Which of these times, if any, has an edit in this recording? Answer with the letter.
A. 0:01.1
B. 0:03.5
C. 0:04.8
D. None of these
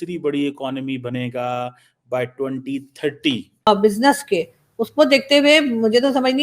B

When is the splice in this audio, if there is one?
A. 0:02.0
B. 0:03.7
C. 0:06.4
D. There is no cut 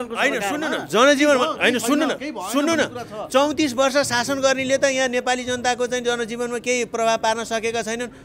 D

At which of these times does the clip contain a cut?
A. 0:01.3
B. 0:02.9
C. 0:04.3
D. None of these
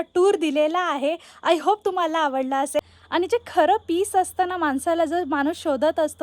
B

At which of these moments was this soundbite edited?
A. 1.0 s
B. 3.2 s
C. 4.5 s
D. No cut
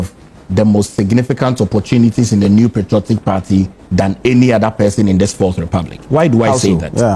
D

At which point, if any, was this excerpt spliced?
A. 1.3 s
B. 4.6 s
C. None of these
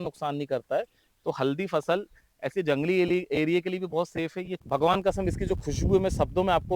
B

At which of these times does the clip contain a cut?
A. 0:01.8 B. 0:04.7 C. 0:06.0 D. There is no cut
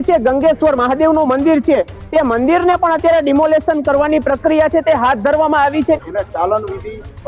C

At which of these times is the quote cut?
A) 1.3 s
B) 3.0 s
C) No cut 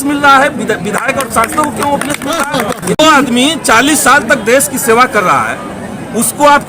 B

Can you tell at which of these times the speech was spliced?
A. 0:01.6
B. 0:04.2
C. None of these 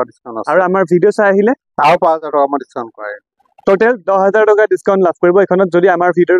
C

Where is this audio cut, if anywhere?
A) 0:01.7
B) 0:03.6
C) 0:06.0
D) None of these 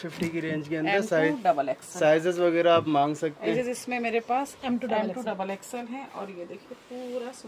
B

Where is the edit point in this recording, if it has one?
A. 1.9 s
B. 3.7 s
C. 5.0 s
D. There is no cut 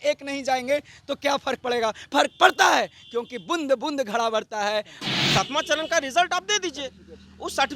C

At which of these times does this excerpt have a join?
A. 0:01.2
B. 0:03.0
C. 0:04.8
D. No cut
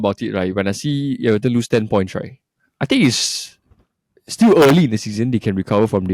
D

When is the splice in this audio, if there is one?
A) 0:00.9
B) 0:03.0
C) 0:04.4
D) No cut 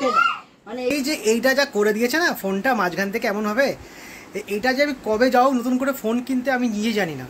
A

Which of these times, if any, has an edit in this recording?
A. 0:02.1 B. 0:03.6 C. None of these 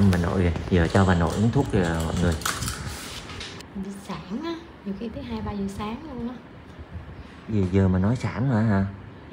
B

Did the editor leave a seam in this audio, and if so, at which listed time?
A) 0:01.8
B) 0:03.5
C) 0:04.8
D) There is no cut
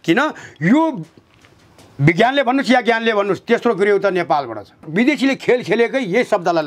C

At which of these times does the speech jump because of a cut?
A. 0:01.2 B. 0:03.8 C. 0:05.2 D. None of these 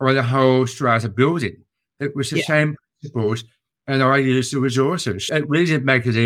C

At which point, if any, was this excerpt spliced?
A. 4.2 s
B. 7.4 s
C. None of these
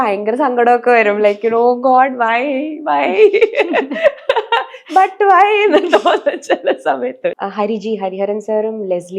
B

